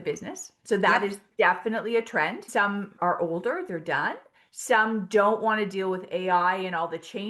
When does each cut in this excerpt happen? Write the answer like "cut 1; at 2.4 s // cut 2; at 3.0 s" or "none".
cut 1; at 2.5 s